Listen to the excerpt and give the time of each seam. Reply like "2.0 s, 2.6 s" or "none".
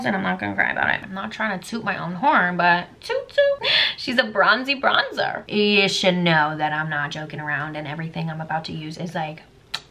1.0 s, 3.6 s, 5.4 s